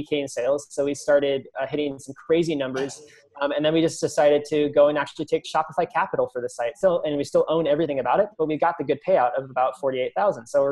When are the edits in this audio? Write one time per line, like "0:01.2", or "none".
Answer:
0:06.8